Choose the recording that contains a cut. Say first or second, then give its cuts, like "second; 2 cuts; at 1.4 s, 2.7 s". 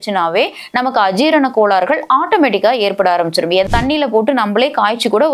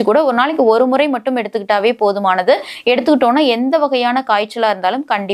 first; 1 cut; at 3.6 s